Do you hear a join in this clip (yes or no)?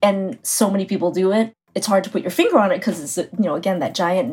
yes